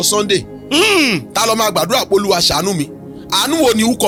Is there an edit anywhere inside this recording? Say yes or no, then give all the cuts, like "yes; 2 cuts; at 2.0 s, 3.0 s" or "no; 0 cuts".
no; 0 cuts